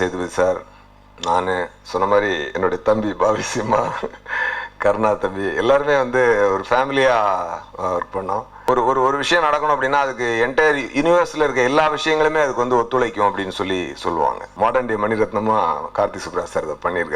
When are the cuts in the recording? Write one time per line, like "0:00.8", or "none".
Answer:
0:08.5
0:14.5